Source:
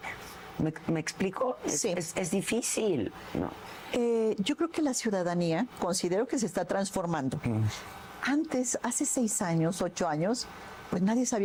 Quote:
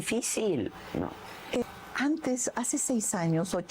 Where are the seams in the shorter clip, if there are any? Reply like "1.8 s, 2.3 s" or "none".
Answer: 1.6 s